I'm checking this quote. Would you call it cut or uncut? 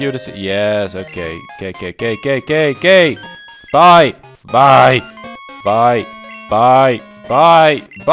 uncut